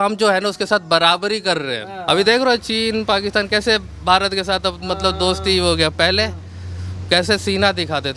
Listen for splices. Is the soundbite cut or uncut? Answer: cut